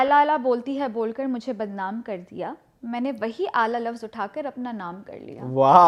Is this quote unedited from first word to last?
yes; 0 cuts

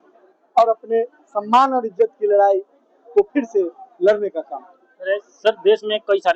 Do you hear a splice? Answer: no; 0 cuts

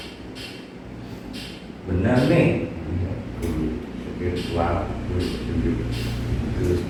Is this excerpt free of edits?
yes; 0 cuts

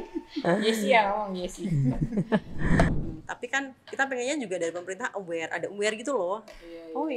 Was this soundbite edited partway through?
yes; 1 cut; at 2.9 s

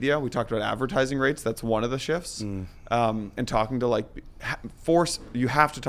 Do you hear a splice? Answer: no; 0 cuts

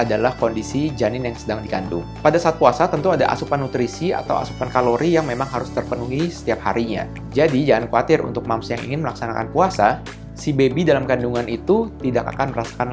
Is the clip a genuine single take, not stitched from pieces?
yes; 0 cuts

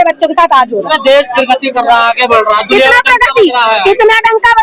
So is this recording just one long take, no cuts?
yes; 0 cuts

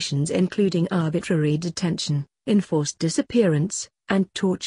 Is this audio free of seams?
no; 1 cut; at 3.7 s

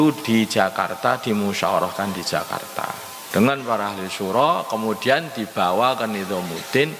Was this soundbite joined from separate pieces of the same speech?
yes; 1 cut; at 3.1 s

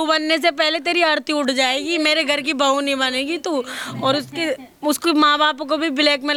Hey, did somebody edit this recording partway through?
no; 0 cuts

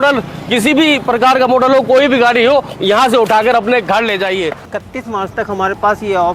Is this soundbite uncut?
no; 1 cut; at 4.6 s

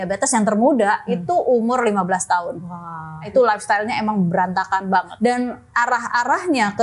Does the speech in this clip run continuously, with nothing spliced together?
no; 2 cuts; at 3.3 s, 5.1 s

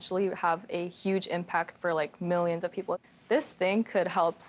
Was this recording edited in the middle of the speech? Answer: yes; 1 cut; at 3.0 s

